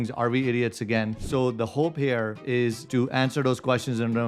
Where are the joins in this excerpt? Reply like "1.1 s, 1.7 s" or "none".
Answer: 1.2 s, 2.6 s